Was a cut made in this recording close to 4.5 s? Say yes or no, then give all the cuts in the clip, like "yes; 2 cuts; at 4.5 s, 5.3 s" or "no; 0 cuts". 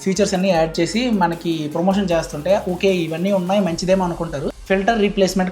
yes; 1 cut; at 4.5 s